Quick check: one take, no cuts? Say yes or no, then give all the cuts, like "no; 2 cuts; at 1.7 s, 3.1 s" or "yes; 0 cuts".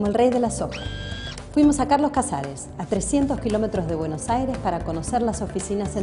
yes; 0 cuts